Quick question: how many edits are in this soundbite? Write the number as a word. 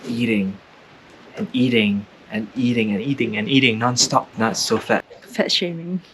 two